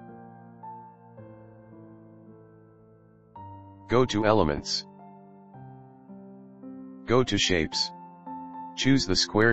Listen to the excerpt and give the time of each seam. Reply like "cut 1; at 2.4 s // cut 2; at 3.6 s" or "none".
cut 1; at 3.8 s // cut 2; at 4.7 s // cut 3; at 7.1 s